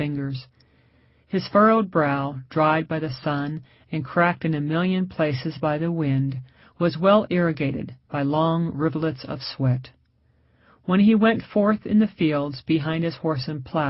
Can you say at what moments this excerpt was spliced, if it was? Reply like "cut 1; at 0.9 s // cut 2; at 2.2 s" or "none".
cut 1; at 8.2 s

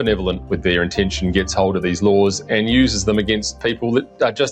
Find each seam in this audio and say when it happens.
none

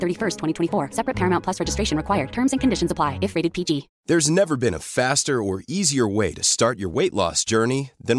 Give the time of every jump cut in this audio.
cut 1; at 3.9 s

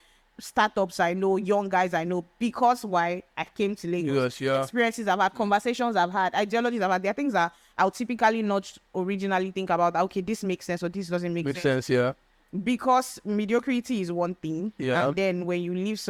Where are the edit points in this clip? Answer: none

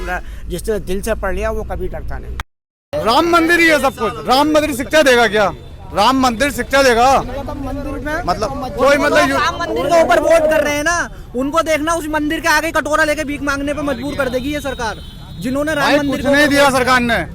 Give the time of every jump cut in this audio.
cut 1; at 2.9 s

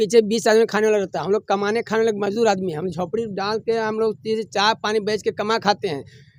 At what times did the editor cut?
none

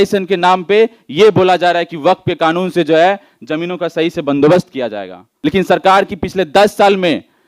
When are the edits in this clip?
cut 1; at 5.3 s

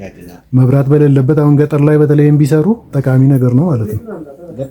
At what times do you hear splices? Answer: cut 1; at 2.9 s

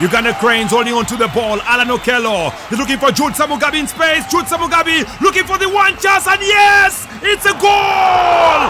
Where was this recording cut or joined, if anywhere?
cut 1; at 2.6 s

